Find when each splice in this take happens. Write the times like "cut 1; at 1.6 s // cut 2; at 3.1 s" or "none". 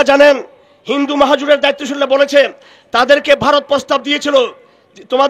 none